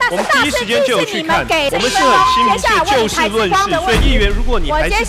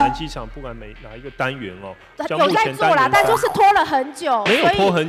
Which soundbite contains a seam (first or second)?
first